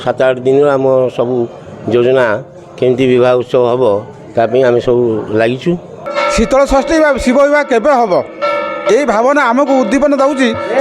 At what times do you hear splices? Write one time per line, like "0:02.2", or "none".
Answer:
0:06.0